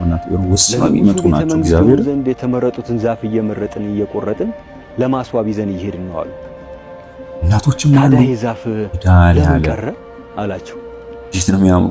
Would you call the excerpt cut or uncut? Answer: uncut